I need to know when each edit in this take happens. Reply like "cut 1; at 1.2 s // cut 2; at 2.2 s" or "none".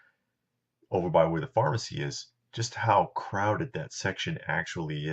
cut 1; at 4.2 s